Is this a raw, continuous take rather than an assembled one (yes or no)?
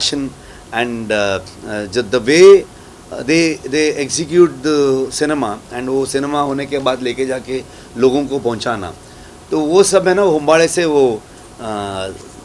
yes